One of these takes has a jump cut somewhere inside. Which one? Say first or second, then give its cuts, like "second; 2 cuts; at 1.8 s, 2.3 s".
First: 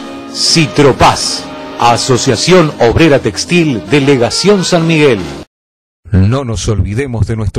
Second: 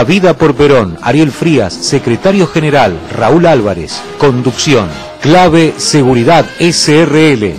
first; 1 cut; at 5.3 s